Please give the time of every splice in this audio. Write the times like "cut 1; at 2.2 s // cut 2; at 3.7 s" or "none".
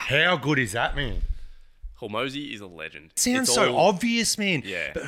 cut 1; at 3.2 s